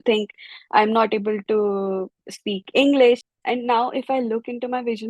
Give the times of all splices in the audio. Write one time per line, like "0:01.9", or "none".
0:03.3